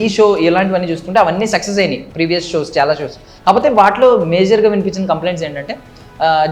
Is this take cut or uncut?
uncut